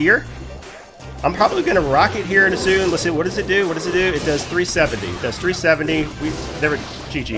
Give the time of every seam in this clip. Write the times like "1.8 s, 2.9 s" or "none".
none